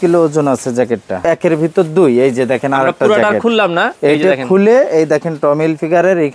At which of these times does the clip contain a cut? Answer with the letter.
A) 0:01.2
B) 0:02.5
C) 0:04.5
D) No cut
A